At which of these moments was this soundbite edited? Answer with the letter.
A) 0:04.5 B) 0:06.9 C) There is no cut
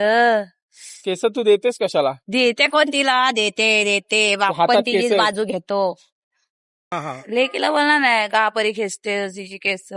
B